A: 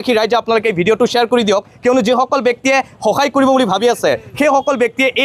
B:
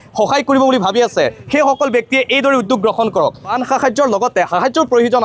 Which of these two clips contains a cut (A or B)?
B